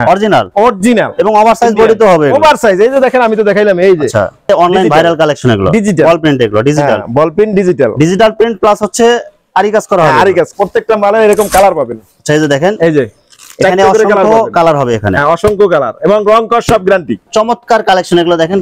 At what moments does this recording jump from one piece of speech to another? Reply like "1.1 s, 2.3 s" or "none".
4.5 s, 10.5 s, 17.3 s